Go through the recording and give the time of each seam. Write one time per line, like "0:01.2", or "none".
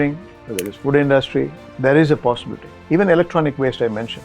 0:01.6

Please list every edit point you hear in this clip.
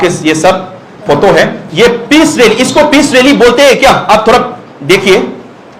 0:01.6

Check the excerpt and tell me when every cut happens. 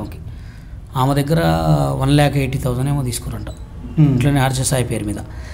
none

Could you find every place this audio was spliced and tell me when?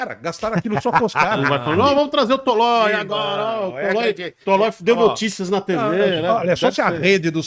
0:01.4

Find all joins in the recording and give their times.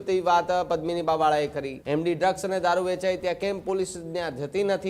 0:01.7

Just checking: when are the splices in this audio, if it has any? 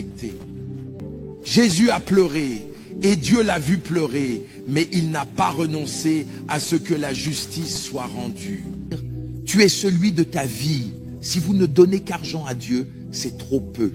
0:01.0
0:08.9

